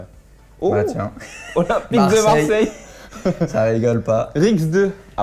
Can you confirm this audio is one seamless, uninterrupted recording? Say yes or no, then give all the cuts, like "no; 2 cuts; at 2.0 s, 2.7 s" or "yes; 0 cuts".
no; 1 cut; at 2.4 s